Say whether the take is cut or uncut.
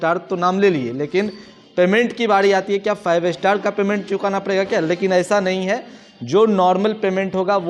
uncut